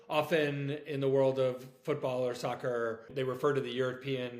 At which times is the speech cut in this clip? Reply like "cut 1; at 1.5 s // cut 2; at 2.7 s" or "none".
cut 1; at 3.1 s